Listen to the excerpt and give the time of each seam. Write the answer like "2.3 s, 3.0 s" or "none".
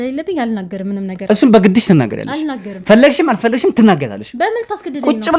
none